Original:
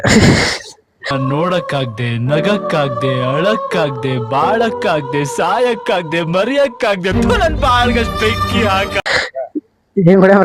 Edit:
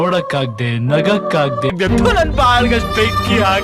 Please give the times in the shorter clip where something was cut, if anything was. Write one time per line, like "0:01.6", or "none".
0:01.7

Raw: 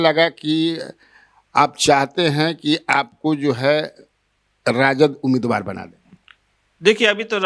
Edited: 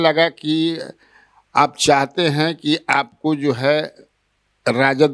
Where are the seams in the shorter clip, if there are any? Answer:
none

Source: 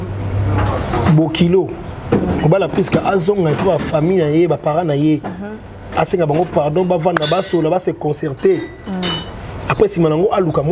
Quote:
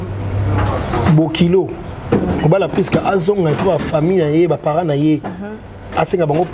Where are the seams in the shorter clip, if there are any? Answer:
none

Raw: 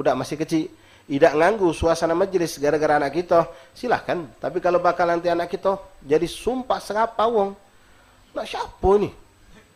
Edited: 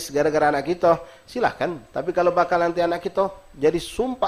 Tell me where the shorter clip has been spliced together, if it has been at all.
none

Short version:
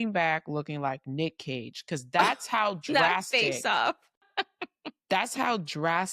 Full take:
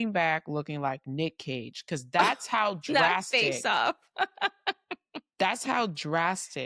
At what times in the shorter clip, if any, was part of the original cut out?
0:04.2

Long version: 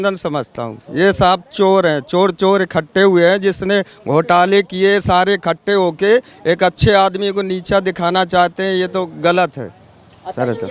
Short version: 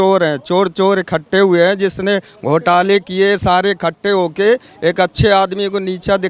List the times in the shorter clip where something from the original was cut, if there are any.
none

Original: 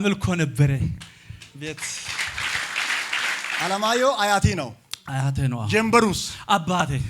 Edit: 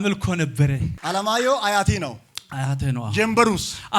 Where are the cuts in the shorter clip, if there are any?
0:01.0

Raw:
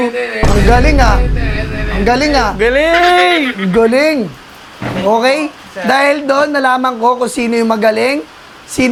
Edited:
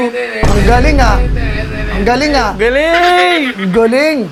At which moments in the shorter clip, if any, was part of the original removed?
none

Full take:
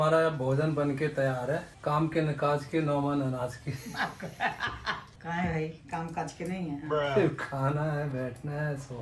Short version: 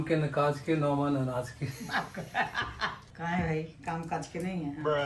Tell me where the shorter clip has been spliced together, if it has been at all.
none

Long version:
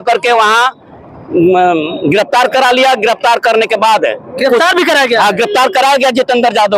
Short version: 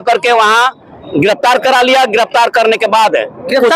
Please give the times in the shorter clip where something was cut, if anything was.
0:01.0

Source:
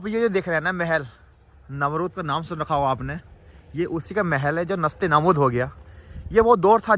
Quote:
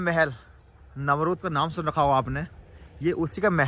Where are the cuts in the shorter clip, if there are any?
none

